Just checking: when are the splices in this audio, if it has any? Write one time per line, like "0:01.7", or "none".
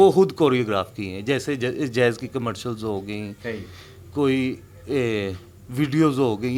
none